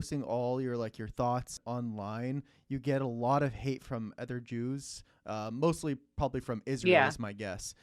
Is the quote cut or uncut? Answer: cut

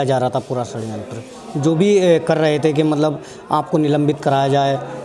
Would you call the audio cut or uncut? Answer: uncut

